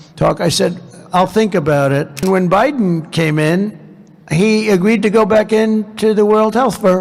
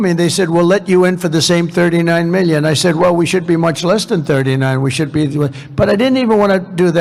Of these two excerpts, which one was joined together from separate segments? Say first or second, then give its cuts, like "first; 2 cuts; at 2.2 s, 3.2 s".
first; 1 cut; at 2.2 s